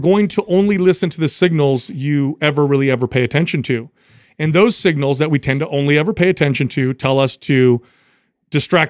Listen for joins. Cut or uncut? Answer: uncut